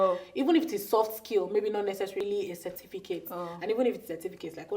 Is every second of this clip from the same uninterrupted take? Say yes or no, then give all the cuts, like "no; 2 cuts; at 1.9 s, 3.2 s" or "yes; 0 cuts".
no; 1 cut; at 2.2 s